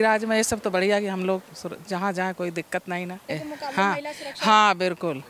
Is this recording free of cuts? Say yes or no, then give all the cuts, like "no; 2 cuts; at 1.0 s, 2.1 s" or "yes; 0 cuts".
no; 1 cut; at 3.3 s